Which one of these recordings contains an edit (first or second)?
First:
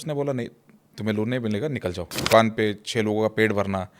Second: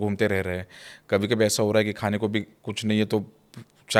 first